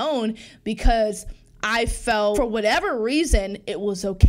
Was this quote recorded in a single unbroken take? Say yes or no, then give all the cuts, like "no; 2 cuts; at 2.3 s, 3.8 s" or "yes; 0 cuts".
no; 1 cut; at 2.4 s